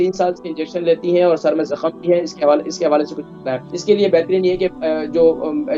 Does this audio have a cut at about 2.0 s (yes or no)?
no